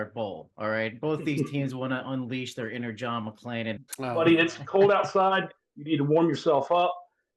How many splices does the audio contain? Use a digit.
1